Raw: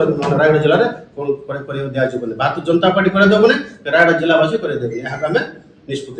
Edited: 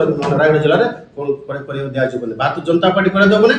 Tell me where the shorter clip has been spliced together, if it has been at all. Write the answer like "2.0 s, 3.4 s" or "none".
none